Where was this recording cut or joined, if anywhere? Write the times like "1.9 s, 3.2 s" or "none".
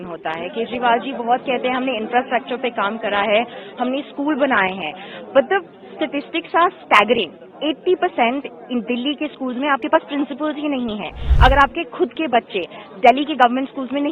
11.2 s